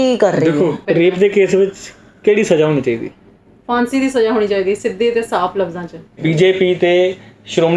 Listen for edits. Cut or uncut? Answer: cut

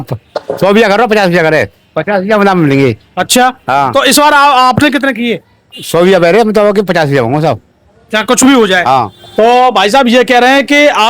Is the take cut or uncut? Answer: cut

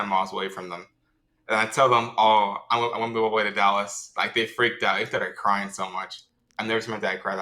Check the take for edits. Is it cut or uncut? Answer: uncut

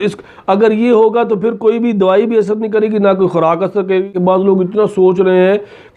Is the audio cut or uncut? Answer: cut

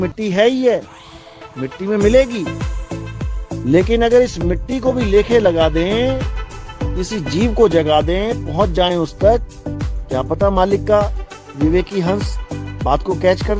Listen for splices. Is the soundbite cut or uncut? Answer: uncut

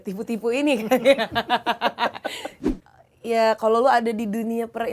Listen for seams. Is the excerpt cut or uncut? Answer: cut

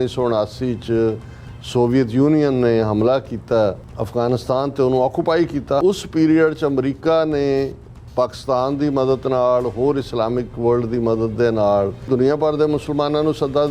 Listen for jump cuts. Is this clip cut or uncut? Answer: cut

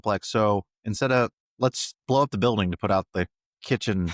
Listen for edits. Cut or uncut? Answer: cut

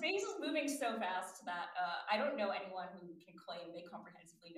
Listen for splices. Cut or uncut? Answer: uncut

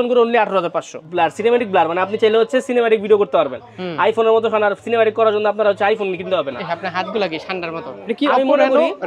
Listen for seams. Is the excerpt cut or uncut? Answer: cut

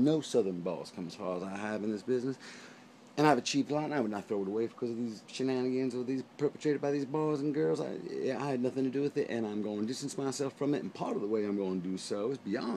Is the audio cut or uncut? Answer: cut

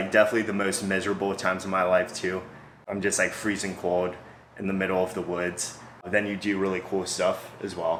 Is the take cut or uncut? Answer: uncut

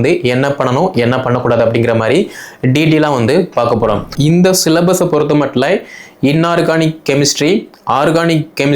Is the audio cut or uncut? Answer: cut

